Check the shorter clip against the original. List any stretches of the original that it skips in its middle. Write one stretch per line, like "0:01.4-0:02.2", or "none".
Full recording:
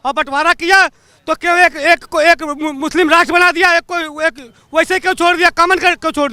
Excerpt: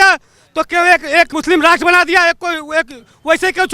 0:02.1-0:02.8